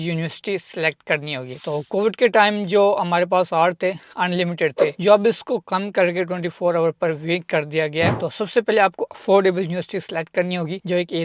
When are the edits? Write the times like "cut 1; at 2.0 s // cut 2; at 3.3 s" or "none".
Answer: cut 1; at 1.6 s // cut 2; at 8.1 s

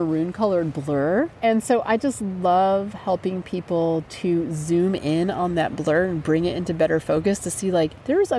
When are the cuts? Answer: cut 1; at 1.3 s

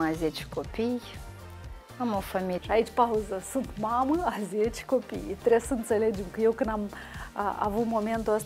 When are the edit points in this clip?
none

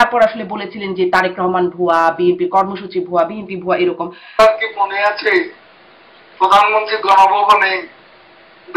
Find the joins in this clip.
cut 1; at 4.4 s

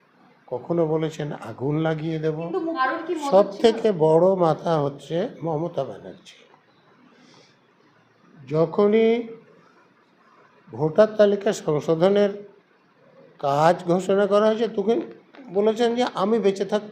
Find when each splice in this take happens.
cut 1; at 2.7 s

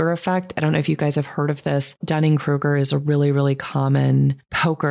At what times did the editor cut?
cut 1; at 2.0 s

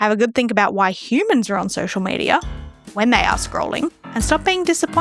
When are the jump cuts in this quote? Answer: none

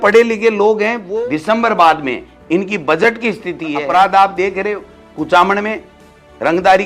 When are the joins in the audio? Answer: cut 1; at 1.0 s // cut 2; at 3.8 s

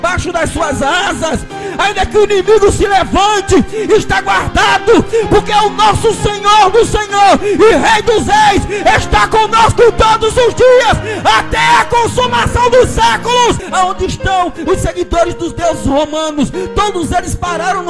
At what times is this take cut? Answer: cut 1; at 13.6 s

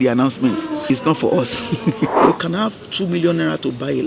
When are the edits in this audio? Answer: cut 1; at 0.8 s // cut 2; at 2.1 s

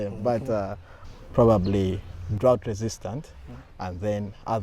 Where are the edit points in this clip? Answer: cut 1; at 1.1 s

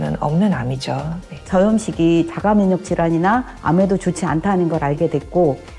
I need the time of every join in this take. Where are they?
cut 1; at 1.5 s

